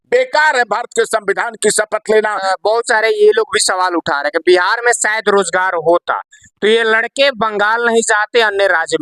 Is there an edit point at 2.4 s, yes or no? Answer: yes